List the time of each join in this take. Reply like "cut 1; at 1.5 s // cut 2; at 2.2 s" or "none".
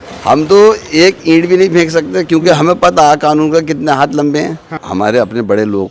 cut 1; at 4.8 s